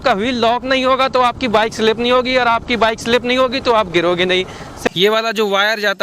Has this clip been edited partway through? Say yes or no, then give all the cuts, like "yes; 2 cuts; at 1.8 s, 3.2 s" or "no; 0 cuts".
yes; 1 cut; at 4.9 s